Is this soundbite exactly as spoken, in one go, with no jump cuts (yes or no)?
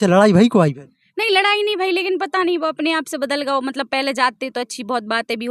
yes